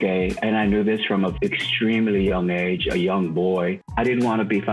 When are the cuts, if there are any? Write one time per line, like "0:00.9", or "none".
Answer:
0:01.3
0:03.8

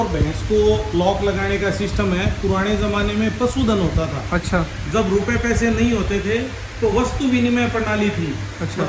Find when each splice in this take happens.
none

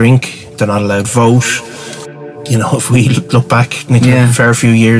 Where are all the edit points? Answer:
0:02.0

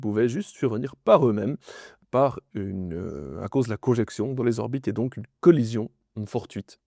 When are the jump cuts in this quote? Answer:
none

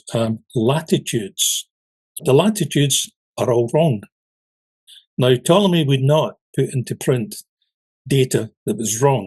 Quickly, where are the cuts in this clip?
0:02.2

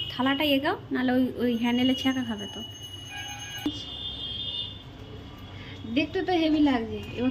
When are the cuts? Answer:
0:03.7

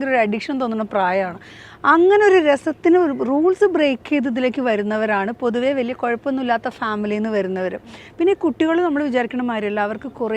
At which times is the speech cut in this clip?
none

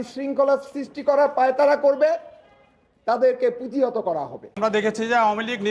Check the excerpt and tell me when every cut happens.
0:04.6

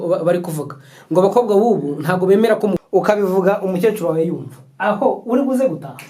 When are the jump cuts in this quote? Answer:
0:02.8

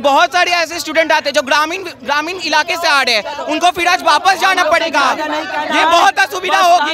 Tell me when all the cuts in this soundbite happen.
none

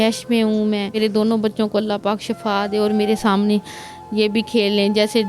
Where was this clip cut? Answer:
0:01.0

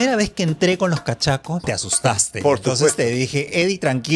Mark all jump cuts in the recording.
0:01.6

